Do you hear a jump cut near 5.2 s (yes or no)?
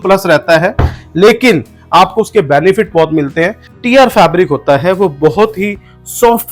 no